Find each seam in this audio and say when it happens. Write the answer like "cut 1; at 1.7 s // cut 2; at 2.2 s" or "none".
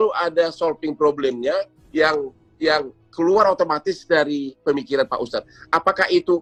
none